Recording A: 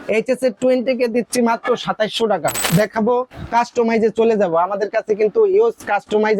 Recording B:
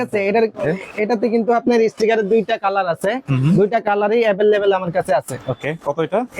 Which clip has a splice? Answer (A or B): A